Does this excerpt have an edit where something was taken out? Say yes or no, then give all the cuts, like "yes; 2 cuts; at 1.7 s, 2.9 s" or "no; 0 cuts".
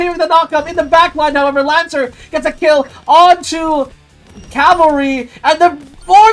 no; 0 cuts